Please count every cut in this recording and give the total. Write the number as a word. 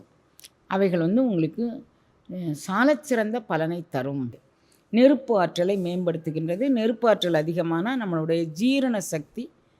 one